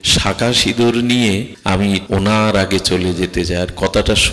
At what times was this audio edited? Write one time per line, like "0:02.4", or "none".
0:02.0